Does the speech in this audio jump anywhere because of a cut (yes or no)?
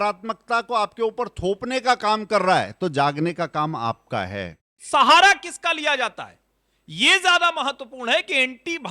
yes